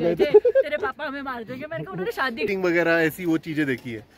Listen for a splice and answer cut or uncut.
cut